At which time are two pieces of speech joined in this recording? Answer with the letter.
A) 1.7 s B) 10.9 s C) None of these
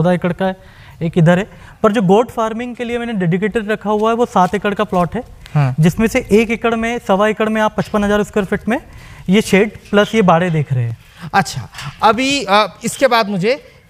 C